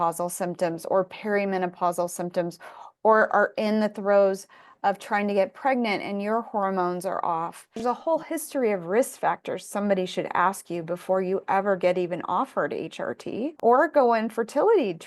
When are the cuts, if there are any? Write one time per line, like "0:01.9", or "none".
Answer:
0:07.8
0:13.6